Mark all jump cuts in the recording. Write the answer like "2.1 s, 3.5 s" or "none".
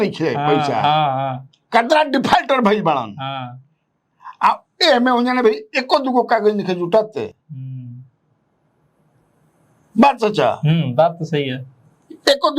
none